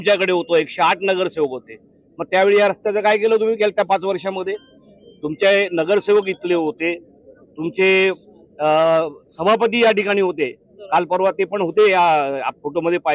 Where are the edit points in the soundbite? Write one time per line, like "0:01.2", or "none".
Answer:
none